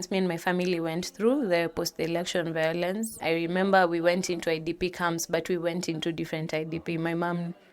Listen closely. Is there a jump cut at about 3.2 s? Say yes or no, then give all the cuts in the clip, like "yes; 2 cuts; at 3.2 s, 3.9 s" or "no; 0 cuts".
yes; 1 cut; at 3.2 s